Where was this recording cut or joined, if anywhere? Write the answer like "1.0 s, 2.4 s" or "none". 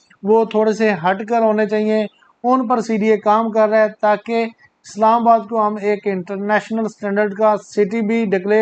none